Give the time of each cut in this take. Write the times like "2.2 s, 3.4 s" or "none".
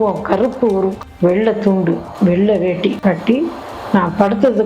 1.0 s